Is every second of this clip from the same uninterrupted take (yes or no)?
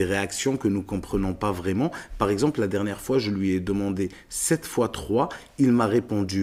yes